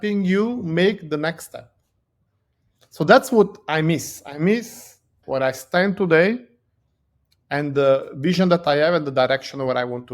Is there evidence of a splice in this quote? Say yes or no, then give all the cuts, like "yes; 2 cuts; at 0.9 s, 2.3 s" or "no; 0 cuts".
yes; 1 cut; at 5.2 s